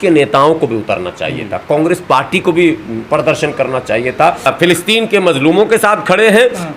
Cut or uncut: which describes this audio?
cut